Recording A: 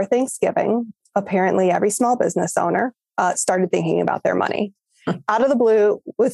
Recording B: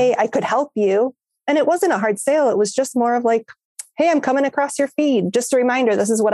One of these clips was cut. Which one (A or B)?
A